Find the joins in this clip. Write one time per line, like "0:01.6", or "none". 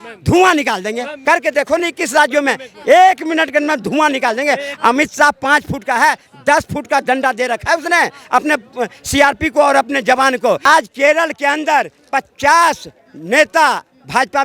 0:01.1
0:10.6